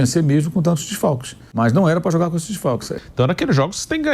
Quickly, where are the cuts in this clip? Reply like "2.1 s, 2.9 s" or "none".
1.4 s, 2.9 s